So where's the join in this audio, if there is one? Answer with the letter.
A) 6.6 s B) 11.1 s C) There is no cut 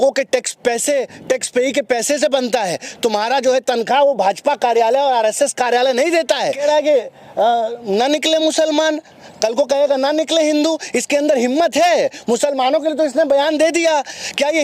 A